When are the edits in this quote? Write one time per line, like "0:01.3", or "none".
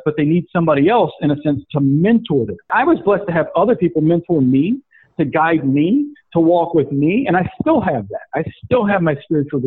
0:02.7